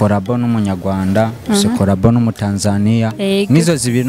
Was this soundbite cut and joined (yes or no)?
no